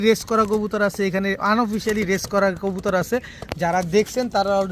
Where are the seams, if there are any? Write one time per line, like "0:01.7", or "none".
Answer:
none